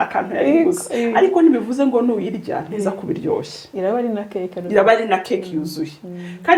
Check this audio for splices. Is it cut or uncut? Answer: uncut